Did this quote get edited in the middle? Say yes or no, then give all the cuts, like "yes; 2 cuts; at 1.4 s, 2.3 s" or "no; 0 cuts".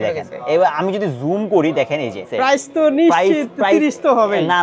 yes; 1 cut; at 2.3 s